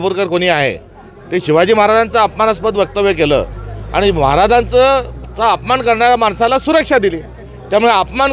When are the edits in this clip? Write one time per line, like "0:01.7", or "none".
none